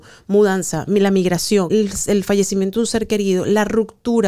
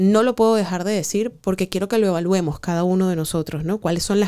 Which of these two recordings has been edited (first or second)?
first